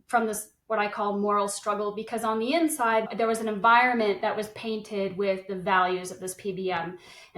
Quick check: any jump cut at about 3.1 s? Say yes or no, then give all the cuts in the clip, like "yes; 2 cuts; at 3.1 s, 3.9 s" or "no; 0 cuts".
yes; 1 cut; at 3.1 s